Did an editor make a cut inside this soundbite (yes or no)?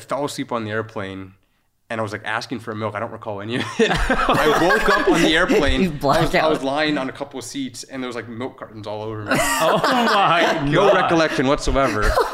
no